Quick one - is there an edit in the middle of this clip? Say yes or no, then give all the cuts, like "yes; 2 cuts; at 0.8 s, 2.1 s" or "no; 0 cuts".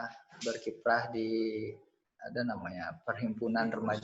no; 0 cuts